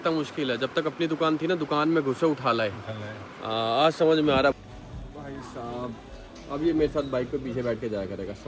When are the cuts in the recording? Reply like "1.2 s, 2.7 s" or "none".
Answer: 4.6 s